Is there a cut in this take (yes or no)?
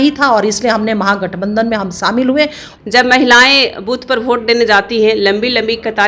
yes